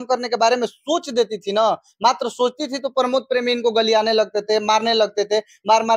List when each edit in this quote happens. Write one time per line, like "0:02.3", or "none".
none